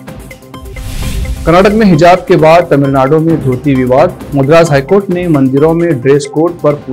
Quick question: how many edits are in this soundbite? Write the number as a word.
zero